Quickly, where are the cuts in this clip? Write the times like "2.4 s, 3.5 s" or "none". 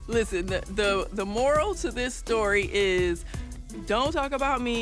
none